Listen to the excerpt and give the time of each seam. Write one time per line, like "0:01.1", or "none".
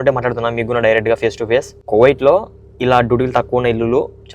0:01.8